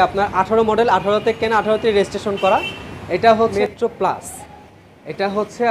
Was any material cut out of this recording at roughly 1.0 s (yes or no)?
no